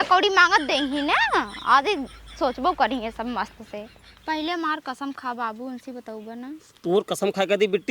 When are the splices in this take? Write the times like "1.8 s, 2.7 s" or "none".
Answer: 4.1 s